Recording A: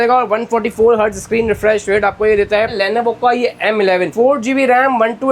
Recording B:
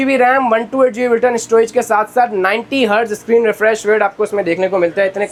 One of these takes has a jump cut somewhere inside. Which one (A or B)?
A